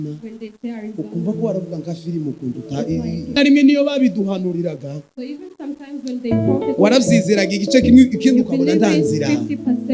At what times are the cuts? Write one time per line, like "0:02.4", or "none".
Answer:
0:03.4